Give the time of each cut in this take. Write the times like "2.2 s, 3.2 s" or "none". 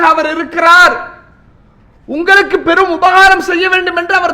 none